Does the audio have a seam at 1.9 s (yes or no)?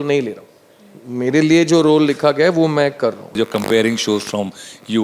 no